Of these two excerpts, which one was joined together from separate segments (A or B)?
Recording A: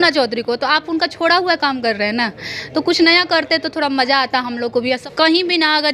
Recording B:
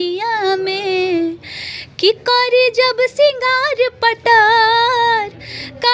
A